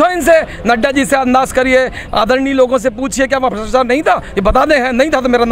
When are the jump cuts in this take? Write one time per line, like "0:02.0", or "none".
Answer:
none